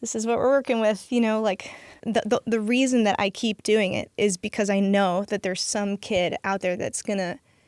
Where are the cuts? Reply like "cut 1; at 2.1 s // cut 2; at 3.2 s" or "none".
cut 1; at 2.0 s

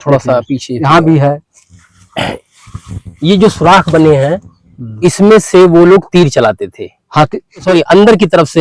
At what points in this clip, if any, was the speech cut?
cut 1; at 7.6 s

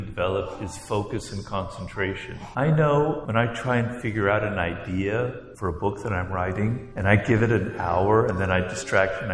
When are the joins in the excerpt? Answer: cut 1; at 2.4 s // cut 2; at 3.2 s // cut 3; at 5.5 s // cut 4; at 6.9 s

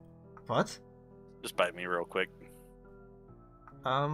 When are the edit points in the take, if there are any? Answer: none

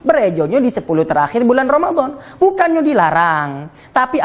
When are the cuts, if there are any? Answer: none

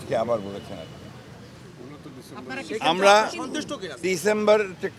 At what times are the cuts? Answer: cut 1; at 4.0 s

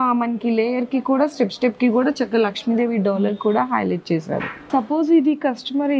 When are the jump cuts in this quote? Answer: cut 1; at 4.6 s

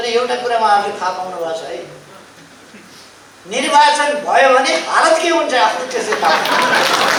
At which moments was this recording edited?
none

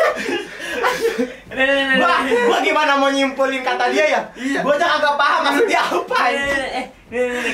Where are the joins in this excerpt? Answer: none

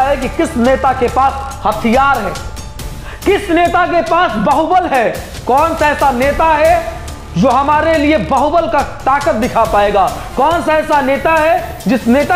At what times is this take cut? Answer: none

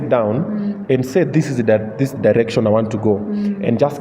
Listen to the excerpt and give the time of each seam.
none

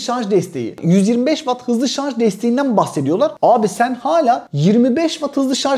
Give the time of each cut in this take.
none

